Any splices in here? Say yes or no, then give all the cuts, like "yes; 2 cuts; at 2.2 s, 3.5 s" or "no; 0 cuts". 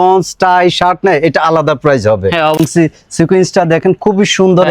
yes; 1 cut; at 2.6 s